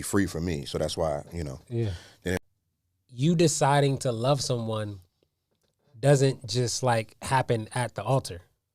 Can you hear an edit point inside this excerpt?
yes; 1 cut; at 2.4 s

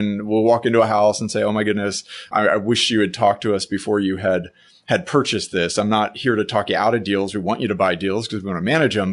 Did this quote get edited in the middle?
yes; 1 cut; at 2.3 s

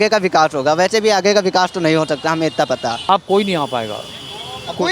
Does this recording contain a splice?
yes; 1 cut; at 3.0 s

